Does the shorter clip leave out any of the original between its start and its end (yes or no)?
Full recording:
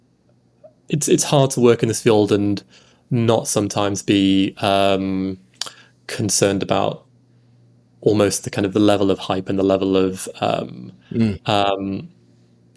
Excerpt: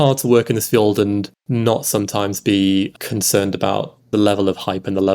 yes